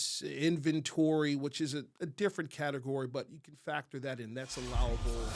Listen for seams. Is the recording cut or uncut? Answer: uncut